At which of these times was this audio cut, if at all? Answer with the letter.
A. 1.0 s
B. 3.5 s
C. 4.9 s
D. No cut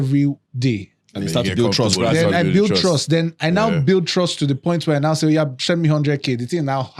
D